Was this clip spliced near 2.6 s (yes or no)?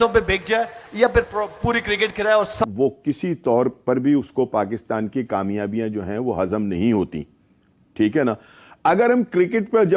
yes